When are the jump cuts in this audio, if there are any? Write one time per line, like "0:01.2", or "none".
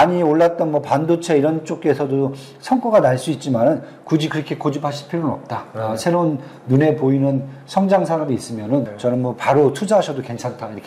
0:08.9